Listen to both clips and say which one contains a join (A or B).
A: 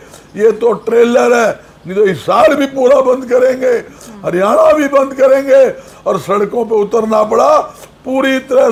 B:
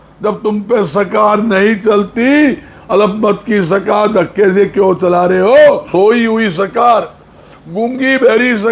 B